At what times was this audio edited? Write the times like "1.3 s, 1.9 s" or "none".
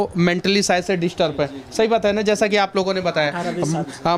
none

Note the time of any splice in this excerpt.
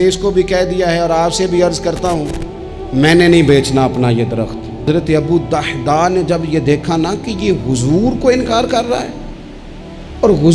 4.9 s

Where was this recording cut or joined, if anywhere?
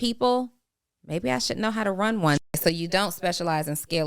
2.5 s

